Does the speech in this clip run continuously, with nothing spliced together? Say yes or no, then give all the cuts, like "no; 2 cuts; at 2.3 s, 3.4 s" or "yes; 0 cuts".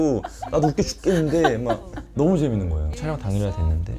no; 1 cut; at 2.8 s